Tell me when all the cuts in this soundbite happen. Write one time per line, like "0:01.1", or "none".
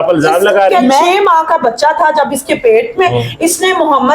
0:01.0